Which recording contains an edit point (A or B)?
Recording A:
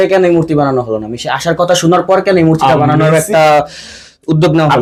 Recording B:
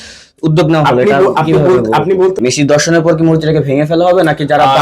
B